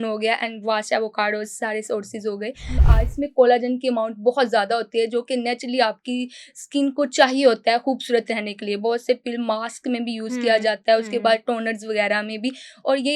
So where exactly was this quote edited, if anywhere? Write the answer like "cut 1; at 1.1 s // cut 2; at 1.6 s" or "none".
cut 1; at 2.8 s

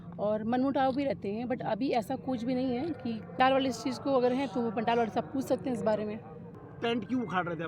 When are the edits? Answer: cut 1; at 3.4 s // cut 2; at 6.5 s

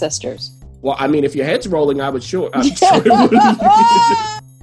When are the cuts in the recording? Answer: none

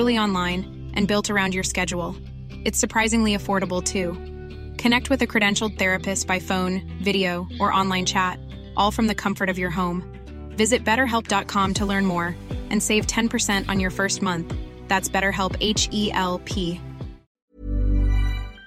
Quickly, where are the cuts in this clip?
cut 1; at 17.3 s

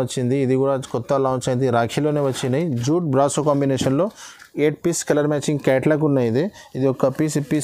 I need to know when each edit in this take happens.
none

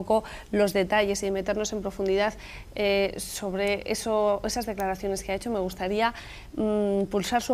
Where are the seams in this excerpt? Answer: none

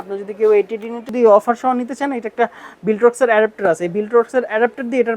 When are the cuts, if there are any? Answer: cut 1; at 1.1 s

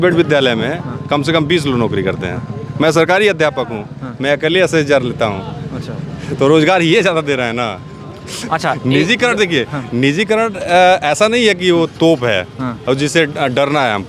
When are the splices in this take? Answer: none

